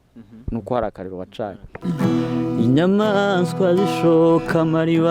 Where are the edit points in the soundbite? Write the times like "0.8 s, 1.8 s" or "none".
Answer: 1.7 s